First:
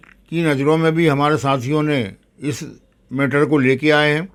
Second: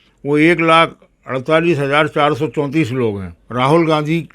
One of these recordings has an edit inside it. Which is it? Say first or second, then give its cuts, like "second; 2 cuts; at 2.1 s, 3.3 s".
second; 1 cut; at 3.3 s